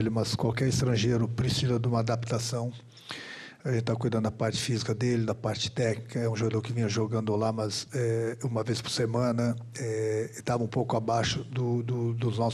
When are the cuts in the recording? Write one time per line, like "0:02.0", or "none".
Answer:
none